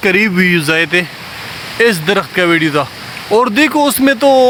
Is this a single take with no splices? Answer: yes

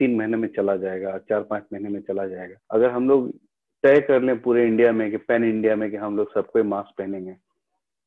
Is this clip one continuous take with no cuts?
no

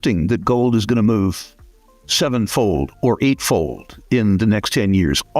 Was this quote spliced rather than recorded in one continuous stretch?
no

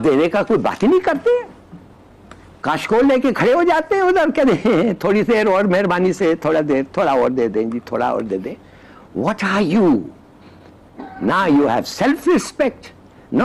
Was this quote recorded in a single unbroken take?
yes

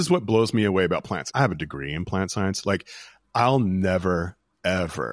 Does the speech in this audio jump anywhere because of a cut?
yes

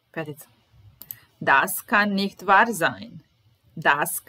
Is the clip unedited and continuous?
yes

